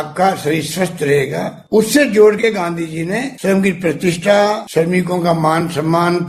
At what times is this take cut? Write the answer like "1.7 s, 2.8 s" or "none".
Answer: 1.6 s, 3.3 s, 4.6 s